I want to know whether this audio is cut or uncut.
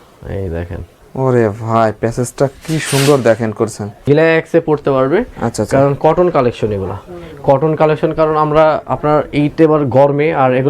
cut